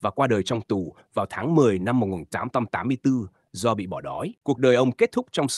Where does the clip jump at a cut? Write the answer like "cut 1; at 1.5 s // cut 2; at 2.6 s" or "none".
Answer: cut 1; at 4.3 s